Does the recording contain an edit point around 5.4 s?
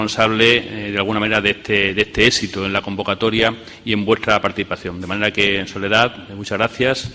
yes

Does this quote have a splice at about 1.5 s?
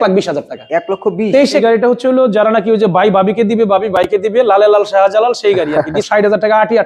yes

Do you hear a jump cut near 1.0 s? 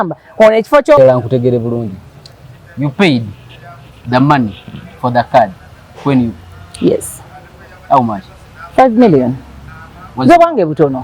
yes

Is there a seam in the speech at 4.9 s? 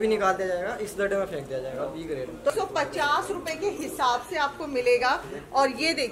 no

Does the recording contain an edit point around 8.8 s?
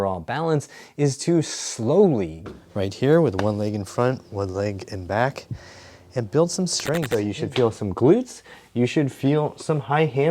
no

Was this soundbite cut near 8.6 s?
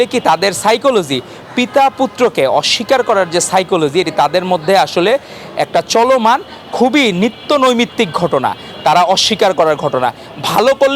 no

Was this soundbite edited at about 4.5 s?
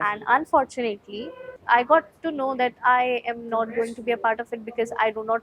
no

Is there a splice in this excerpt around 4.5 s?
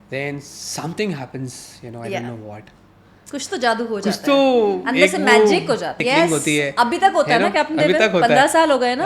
no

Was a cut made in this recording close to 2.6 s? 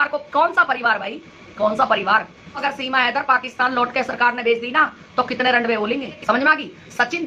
yes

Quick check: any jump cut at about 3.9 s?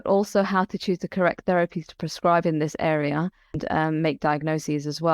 yes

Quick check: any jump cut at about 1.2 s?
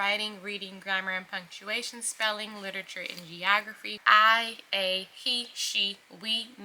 no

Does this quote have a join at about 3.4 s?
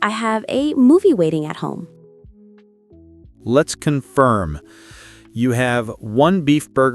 yes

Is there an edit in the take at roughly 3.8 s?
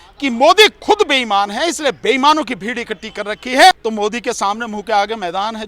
yes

